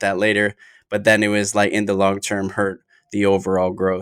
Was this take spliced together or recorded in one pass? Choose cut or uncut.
uncut